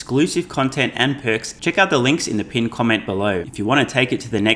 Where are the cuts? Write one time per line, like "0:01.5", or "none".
0:01.5
0:03.5